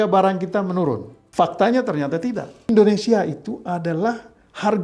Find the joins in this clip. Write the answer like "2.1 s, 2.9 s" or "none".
1.2 s, 2.7 s